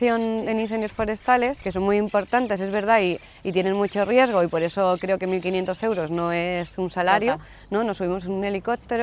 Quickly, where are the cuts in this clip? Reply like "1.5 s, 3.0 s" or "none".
1.6 s